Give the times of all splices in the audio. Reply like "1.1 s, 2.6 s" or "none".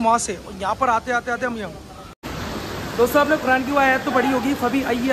2.1 s